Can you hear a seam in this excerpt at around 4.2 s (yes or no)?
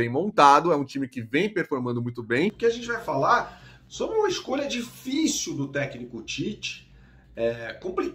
no